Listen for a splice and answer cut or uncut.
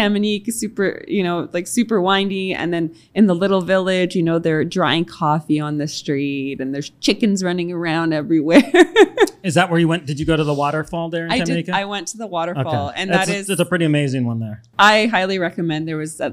uncut